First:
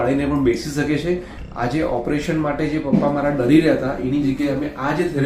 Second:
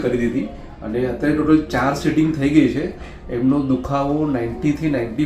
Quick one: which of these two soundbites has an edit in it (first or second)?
first